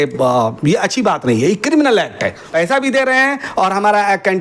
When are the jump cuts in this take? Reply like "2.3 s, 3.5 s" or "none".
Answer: 2.5 s

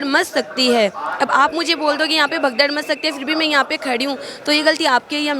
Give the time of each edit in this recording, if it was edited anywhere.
none

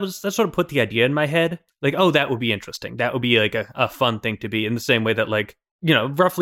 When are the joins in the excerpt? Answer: 1.7 s

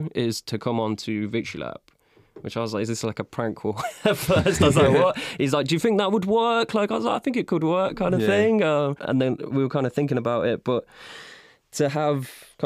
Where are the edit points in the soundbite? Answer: none

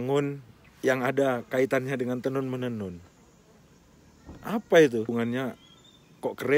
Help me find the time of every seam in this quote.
5.1 s

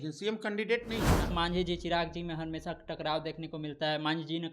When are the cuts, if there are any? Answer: 1.3 s

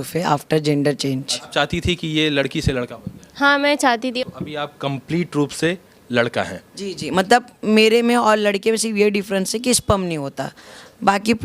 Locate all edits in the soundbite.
1.3 s, 4.2 s

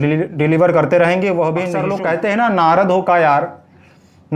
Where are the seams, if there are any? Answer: 1.8 s

